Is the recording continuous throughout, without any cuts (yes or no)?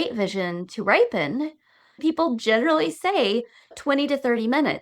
no